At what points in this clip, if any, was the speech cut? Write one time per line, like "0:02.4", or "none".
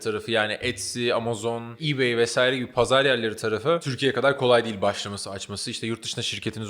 0:01.8
0:03.9